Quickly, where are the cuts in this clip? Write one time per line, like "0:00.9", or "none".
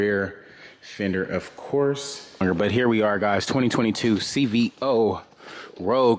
0:02.4